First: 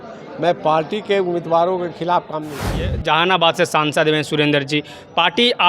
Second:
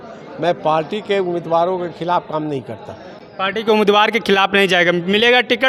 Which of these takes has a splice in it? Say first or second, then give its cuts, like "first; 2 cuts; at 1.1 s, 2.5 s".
first; 1 cut; at 3.0 s